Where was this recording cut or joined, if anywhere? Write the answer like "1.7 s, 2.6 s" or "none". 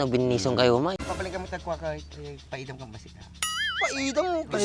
0.9 s